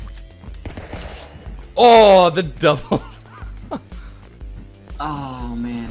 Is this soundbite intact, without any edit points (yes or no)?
yes